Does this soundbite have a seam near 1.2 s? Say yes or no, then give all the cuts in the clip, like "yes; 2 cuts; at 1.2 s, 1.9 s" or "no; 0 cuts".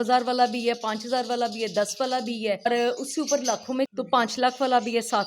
no; 2 cuts; at 2.7 s, 3.9 s